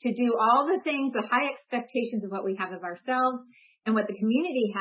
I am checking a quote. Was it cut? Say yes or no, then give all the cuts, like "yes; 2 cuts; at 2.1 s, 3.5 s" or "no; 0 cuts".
no; 0 cuts